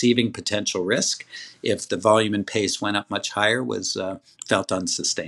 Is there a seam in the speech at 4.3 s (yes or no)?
yes